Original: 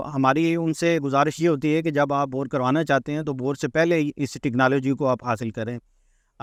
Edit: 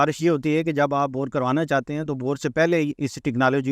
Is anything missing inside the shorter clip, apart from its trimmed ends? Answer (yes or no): no